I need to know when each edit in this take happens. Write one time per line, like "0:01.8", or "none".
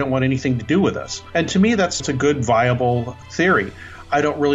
0:01.1
0:02.0
0:03.1